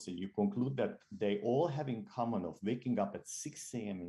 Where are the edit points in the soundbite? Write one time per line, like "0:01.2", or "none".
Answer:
none